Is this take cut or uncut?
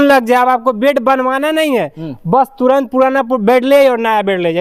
uncut